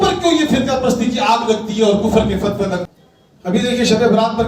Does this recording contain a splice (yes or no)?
yes